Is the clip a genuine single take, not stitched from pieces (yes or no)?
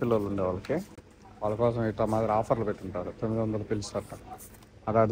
yes